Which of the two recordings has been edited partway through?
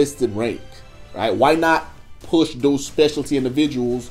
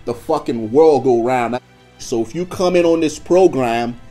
second; 1 cut; at 1.8 s

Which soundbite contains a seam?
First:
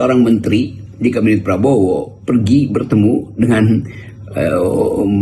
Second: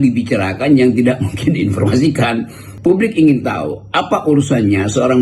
second; 1 cut; at 2.6 s

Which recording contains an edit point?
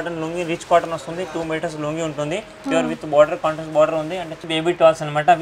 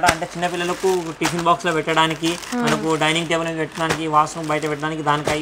first; 1 cut; at 4.3 s

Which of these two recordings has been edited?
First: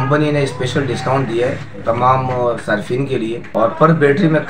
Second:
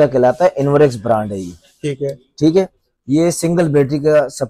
first; 2 cuts; at 1.7 s, 3.4 s

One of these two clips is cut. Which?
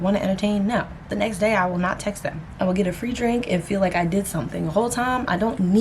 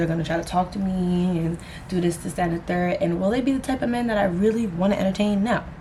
first; 1 cut; at 2.4 s

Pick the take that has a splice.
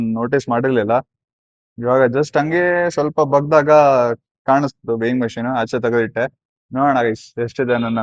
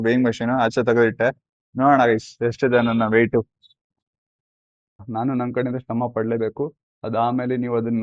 second; 1 cut; at 5.0 s

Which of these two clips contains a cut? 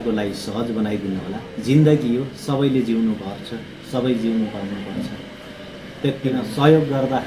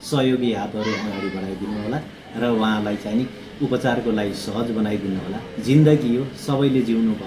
first; 1 cut; at 6.3 s

